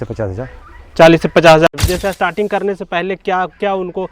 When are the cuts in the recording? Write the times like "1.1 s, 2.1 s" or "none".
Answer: 1.7 s